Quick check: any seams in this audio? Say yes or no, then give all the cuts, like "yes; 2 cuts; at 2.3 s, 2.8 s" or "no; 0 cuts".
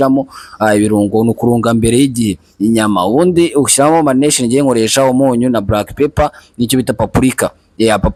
no; 0 cuts